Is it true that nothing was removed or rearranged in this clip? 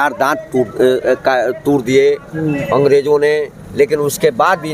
yes; 0 cuts

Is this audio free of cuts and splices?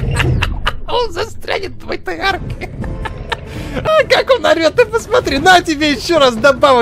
no; 1 cut; at 3.9 s

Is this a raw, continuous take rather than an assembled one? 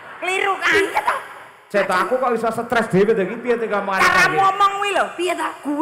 yes; 0 cuts

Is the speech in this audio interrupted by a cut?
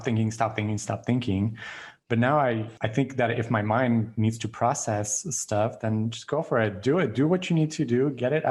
yes; 1 cut; at 2.7 s

